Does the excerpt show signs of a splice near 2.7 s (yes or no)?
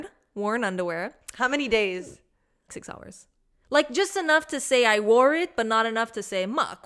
yes